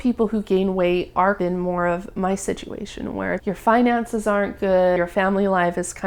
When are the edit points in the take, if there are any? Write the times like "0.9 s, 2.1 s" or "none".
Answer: 1.4 s, 3.4 s, 5.0 s